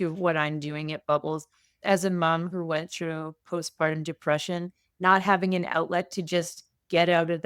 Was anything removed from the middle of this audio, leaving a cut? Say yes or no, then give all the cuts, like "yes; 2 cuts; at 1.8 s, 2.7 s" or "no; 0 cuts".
no; 0 cuts